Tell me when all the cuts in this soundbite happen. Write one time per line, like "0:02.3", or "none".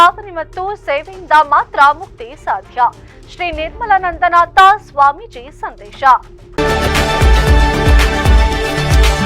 0:06.4